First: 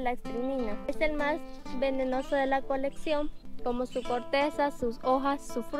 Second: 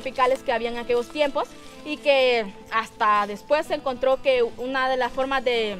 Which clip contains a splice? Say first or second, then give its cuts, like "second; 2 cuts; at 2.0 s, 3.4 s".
first; 2 cuts; at 0.9 s, 3.4 s